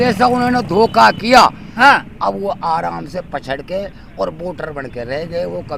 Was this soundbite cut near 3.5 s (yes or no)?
no